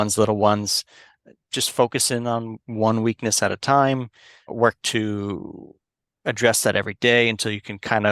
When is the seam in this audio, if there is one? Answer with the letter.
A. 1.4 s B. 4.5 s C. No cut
B